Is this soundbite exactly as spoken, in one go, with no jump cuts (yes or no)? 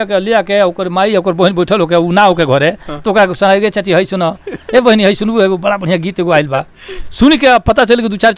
yes